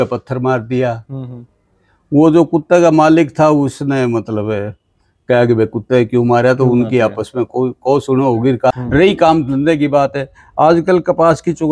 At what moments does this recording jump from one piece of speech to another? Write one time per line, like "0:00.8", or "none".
0:08.7

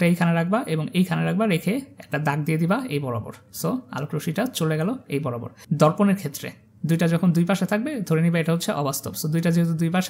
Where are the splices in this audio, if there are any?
0:05.5

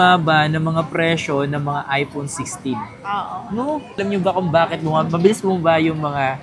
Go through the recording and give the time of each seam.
none

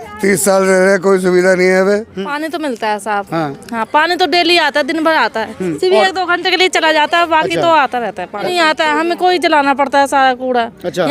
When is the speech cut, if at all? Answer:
0:02.2
0:08.4

